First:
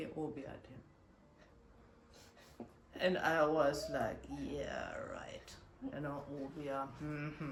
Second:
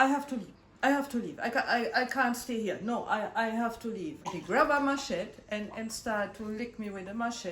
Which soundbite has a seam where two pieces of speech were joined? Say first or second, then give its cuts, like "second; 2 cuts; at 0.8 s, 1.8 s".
second; 1 cut; at 4.2 s